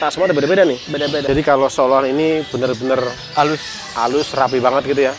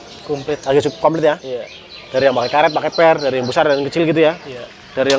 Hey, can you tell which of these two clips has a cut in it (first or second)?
first